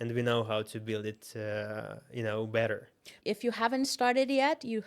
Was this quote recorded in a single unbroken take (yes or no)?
no